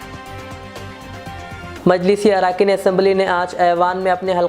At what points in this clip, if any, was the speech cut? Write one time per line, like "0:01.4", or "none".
0:01.8